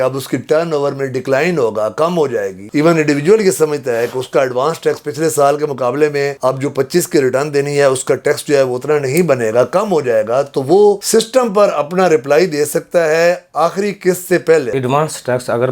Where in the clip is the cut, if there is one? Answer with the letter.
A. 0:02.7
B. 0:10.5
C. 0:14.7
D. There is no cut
C